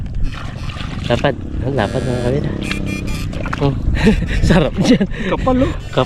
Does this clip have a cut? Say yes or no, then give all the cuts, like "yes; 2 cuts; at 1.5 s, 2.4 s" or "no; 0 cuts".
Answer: no; 0 cuts